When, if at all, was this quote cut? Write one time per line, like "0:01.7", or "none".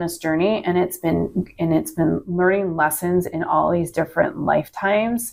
none